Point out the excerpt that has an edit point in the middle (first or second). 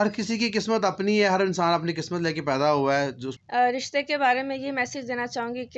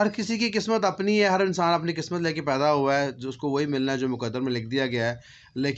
first